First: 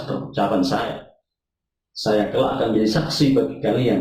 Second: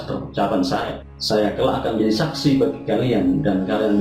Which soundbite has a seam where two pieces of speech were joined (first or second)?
second